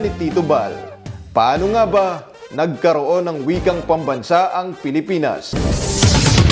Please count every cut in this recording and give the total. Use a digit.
1